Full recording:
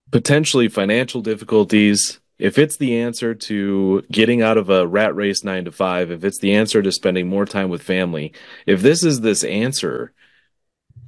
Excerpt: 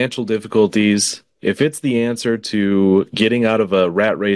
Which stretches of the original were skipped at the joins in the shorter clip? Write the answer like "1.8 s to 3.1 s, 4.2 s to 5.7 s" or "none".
none